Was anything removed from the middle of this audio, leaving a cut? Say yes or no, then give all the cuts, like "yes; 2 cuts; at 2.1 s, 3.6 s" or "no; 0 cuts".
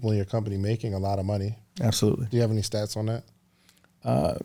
no; 0 cuts